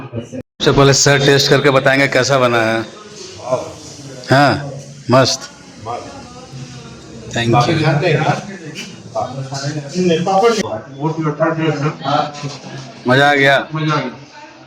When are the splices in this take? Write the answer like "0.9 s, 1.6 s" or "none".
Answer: 10.6 s

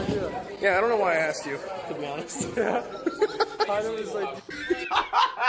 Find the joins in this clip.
4.4 s

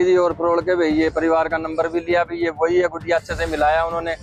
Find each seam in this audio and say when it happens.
none

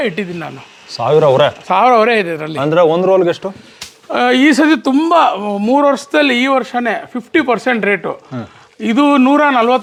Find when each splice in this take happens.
none

